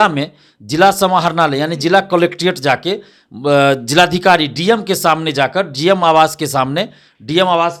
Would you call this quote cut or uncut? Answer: uncut